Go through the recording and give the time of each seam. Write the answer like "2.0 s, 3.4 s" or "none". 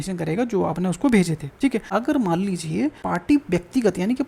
1.7 s, 3.0 s